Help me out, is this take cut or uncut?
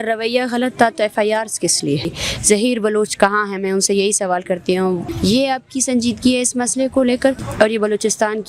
cut